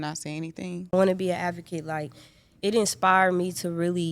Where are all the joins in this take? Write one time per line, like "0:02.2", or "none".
0:00.9